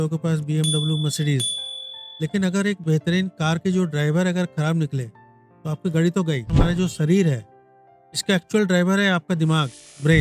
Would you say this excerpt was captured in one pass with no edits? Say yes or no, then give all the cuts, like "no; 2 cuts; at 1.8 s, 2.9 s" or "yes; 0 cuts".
no; 1 cut; at 6.6 s